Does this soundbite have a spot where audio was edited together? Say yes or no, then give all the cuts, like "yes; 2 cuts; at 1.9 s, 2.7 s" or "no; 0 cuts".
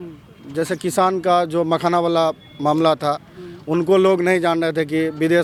no; 0 cuts